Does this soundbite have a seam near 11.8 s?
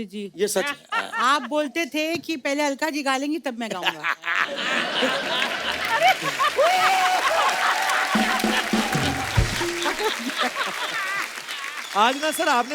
yes; 1 cut; at 11.8 s

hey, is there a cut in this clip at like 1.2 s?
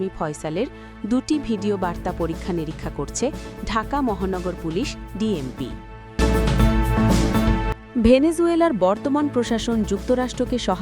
no; 2 cuts; at 6.0 s, 7.8 s

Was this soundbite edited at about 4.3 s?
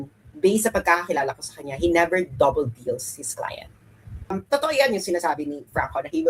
yes; 1 cut; at 4.3 s

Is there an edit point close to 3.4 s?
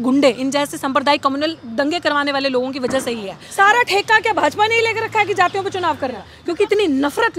yes; 2 cuts; at 3.4 s, 6.3 s

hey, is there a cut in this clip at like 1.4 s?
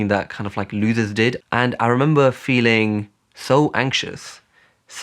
yes; 1 cut; at 1.4 s

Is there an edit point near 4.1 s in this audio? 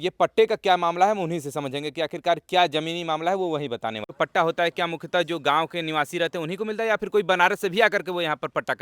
yes; 1 cut; at 4.1 s

